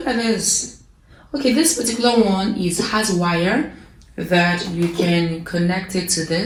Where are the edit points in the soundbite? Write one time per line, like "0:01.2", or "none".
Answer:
none